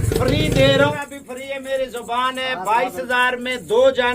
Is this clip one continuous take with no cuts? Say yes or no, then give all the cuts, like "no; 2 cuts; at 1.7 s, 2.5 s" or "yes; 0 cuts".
no; 1 cut; at 0.9 s